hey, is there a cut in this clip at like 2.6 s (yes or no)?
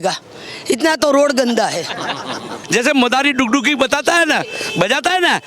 yes